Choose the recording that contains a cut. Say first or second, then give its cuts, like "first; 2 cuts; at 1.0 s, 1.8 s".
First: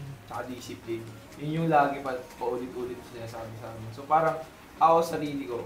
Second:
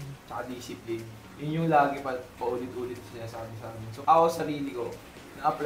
second; 1 cut; at 3.8 s